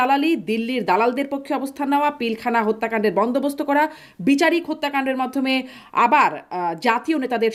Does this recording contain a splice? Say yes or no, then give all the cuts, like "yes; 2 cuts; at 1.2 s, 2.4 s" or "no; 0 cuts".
no; 0 cuts